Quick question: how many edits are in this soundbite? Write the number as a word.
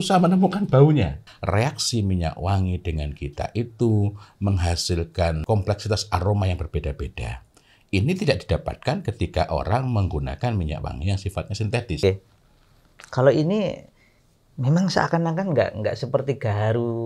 three